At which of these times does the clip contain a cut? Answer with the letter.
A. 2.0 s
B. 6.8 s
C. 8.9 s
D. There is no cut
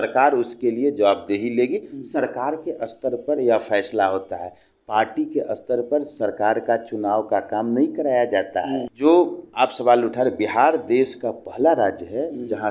C